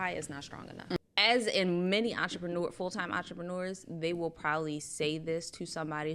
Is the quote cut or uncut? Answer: cut